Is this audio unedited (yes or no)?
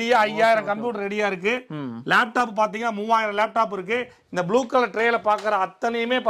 yes